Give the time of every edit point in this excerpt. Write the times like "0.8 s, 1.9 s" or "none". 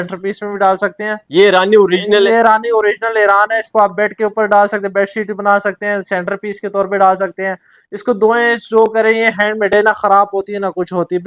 none